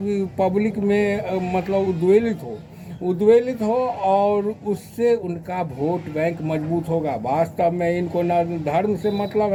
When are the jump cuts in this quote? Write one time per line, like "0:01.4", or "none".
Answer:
none